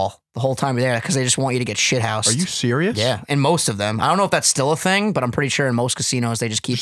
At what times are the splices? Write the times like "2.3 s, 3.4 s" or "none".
none